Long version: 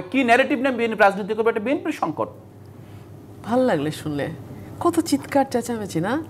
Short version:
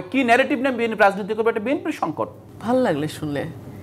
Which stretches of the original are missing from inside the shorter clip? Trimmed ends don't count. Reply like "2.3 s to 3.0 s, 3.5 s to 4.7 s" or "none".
2.5 s to 3.3 s